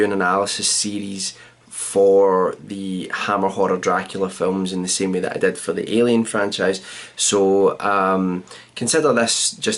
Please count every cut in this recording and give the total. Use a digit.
1